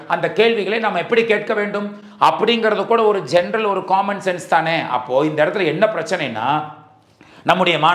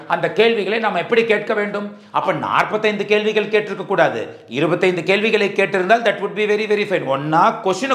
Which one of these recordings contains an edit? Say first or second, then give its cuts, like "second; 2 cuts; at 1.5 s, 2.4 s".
second; 1 cut; at 2.0 s